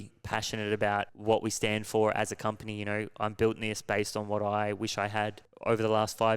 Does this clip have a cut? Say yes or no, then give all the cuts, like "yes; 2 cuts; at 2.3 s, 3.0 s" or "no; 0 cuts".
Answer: yes; 2 cuts; at 1.1 s, 5.5 s